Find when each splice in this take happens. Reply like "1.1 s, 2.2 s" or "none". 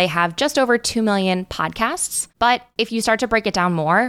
2.6 s